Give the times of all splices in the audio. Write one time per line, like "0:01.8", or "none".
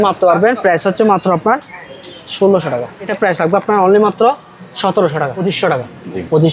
0:03.1
0:05.4